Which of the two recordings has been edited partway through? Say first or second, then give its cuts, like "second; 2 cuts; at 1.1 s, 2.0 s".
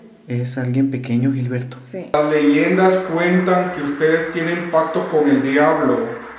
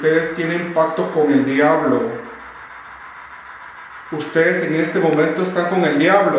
first; 1 cut; at 2.1 s